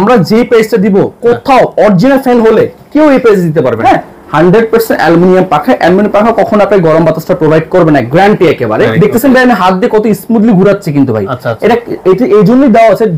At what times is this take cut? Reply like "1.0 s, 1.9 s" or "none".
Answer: 3.8 s, 8.9 s

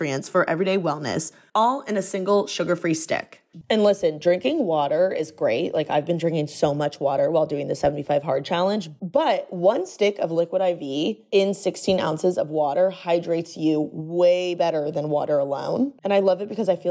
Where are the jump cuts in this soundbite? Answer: 3.5 s

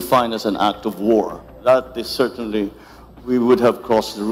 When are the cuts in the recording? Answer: 1.4 s

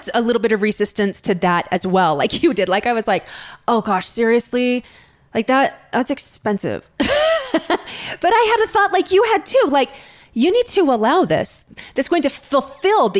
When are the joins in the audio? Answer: 11.6 s

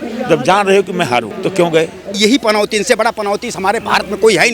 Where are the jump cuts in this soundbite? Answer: 1.3 s, 2.1 s

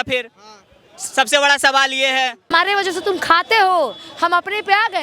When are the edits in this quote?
2.5 s

